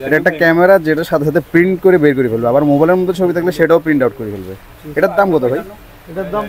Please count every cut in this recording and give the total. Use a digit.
0